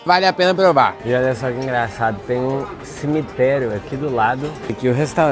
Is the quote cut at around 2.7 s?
no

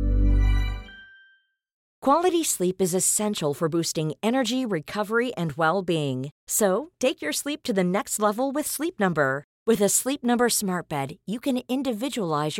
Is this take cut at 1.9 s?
yes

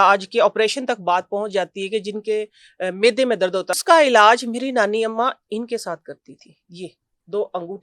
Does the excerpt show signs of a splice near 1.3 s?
no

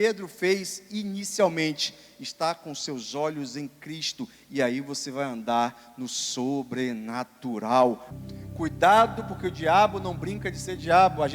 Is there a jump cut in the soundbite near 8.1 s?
yes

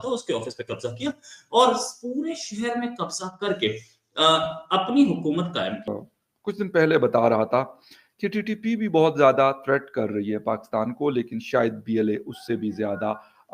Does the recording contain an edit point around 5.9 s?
yes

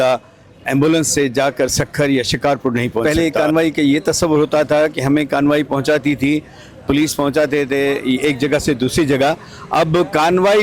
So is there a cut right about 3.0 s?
yes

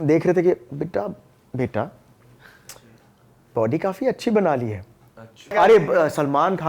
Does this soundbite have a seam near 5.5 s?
yes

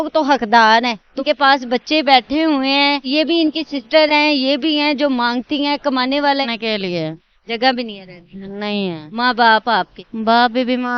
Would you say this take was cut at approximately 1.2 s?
yes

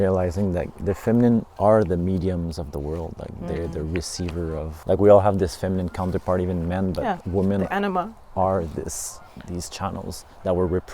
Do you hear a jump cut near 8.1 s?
no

